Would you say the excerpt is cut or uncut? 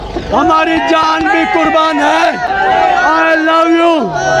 uncut